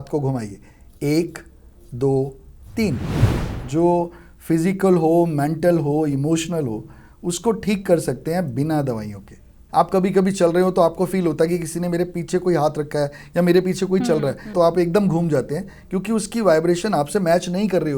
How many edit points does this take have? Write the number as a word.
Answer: three